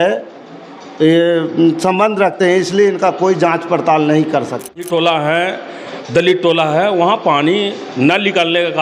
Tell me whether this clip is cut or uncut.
cut